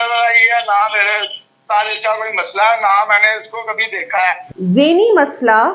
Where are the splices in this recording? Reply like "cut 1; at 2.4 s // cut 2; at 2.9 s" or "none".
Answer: cut 1; at 4.5 s